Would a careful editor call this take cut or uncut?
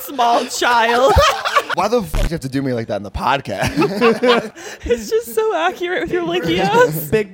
cut